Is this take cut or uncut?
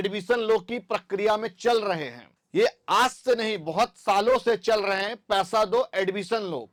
uncut